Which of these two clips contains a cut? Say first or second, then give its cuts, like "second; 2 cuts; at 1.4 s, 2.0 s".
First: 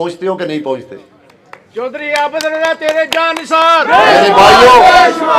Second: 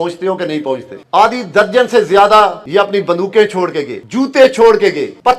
second; 2 cuts; at 1.0 s, 2.6 s